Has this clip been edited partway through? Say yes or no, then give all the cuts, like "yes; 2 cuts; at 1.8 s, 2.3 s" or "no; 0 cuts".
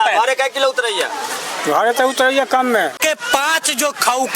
yes; 1 cut; at 3.0 s